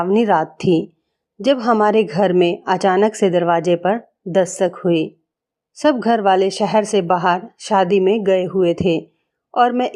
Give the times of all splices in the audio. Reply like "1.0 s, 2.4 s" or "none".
none